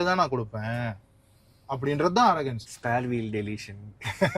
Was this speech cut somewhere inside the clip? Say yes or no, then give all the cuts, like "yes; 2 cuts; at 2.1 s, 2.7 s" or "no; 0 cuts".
yes; 1 cut; at 2.6 s